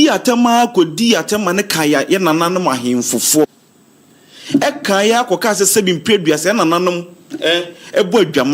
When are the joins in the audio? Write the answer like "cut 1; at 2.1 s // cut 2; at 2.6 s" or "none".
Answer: cut 1; at 2.0 s // cut 2; at 3.4 s